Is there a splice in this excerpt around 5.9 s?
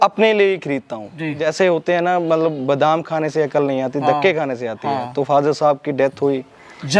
no; 1 cut; at 1.4 s

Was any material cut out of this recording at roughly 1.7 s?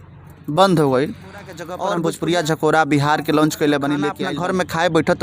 yes; 2 cuts; at 1.7 s, 4.2 s

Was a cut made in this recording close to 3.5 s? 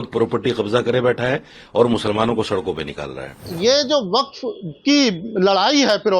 yes; 1 cut; at 3.5 s

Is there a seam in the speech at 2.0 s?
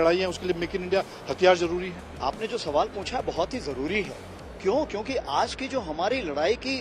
yes; 1 cut; at 2.0 s

